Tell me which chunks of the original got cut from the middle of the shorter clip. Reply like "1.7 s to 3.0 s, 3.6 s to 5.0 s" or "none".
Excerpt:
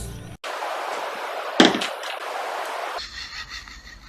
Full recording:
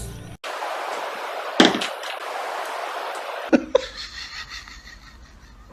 3.0 s to 4.0 s

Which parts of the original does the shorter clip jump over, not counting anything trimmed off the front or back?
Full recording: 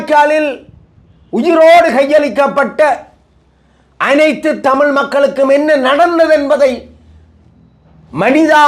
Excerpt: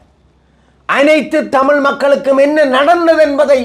none

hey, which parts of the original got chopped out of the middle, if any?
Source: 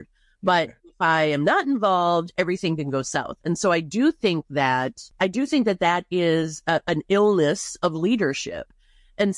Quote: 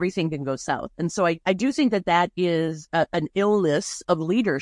3.9 s to 5.1 s

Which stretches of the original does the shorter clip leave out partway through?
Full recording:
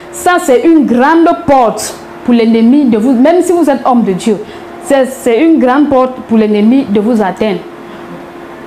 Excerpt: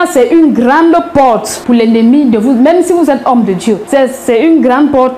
1.8 s to 2.1 s, 4.4 s to 4.8 s

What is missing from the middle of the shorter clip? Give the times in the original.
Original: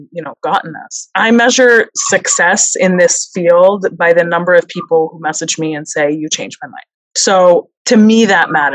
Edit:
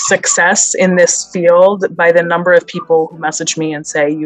none

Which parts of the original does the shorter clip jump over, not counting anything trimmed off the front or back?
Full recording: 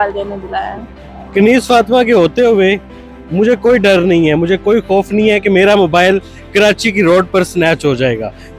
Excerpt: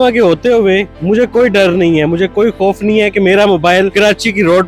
2.9 s to 3.2 s, 6.2 s to 6.5 s

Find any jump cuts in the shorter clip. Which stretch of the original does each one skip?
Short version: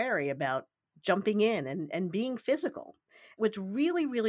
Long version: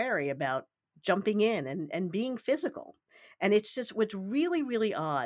3.2 s to 3.8 s

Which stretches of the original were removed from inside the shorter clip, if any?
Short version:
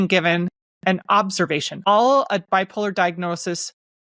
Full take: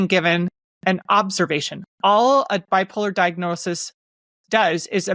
1.9 s to 2.1 s

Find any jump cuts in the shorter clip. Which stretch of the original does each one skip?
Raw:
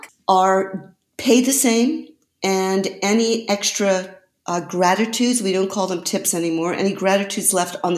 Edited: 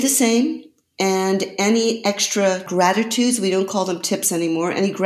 4.1 s to 4.7 s

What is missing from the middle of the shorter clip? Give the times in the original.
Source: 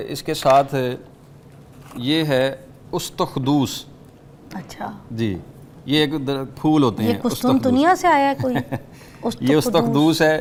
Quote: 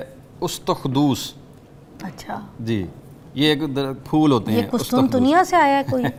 none

